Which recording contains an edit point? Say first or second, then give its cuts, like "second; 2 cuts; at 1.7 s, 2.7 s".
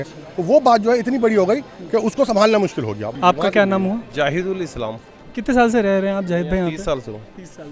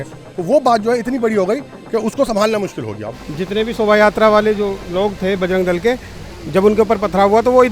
second; 2 cuts; at 3.0 s, 4.8 s